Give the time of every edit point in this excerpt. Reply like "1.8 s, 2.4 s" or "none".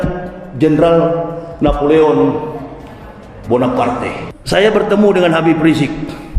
4.3 s